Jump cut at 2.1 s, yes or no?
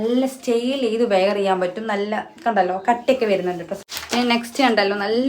no